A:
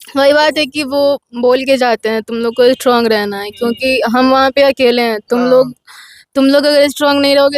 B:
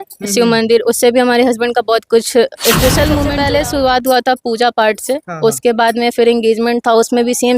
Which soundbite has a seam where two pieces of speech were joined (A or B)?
B